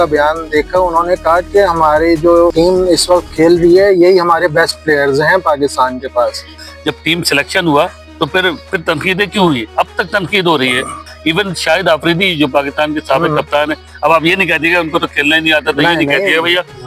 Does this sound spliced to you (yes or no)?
yes